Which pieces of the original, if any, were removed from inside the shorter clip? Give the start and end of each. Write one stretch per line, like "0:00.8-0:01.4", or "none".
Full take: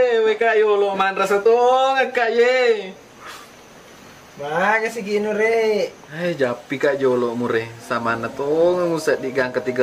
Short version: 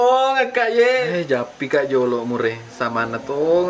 0:02.6-0:06.1